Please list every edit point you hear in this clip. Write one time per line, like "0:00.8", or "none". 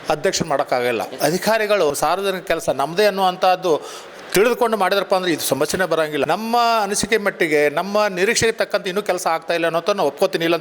0:01.1
0:01.9
0:06.2